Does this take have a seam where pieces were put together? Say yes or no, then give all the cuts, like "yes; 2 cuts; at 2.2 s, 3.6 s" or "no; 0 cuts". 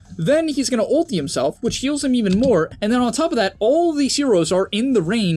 yes; 1 cut; at 2.7 s